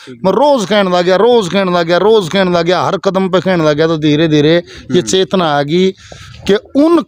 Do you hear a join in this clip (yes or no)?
no